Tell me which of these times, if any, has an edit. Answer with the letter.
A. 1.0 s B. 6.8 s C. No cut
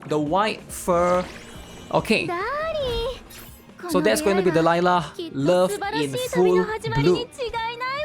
C